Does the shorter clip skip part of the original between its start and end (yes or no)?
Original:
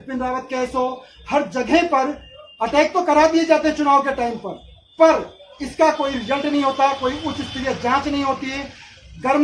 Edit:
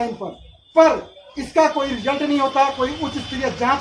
no